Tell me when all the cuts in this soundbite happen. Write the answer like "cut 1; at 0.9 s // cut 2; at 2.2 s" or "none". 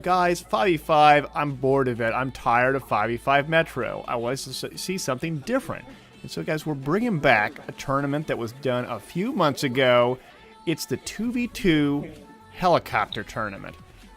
cut 1; at 12.9 s